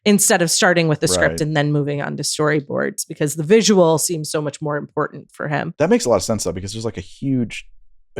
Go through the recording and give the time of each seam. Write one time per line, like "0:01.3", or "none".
0:05.7